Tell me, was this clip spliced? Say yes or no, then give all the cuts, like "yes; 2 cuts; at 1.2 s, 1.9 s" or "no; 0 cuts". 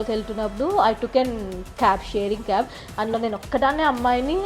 no; 0 cuts